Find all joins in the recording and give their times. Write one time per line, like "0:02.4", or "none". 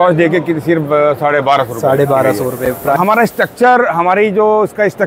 0:03.0